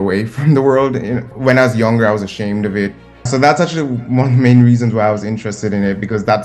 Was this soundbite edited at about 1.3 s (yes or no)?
yes